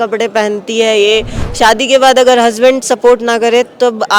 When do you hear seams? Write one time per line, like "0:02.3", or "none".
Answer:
0:01.4